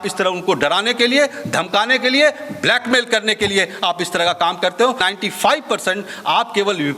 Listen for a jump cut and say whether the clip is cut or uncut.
cut